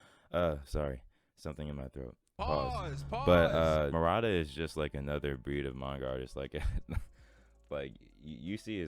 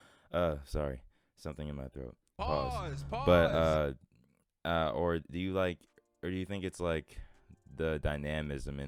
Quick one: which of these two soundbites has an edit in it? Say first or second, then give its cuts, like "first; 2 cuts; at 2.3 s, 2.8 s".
first; 1 cut; at 3.9 s